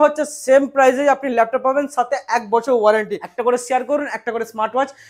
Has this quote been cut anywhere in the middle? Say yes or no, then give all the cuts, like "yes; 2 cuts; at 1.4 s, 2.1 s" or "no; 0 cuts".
yes; 1 cut; at 3.2 s